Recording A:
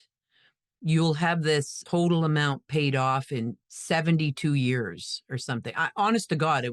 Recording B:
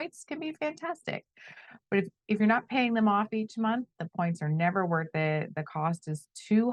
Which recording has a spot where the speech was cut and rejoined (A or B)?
A